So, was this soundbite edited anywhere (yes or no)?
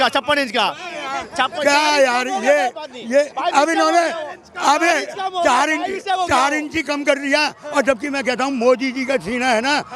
no